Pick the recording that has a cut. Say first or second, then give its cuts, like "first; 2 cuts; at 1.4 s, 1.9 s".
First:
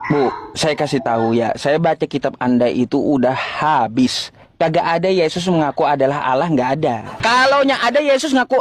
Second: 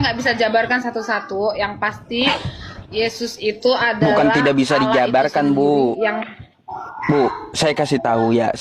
first; 1 cut; at 7.1 s